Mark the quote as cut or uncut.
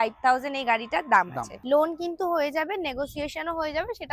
uncut